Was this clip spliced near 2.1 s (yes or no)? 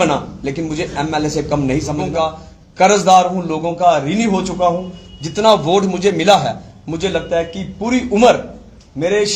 yes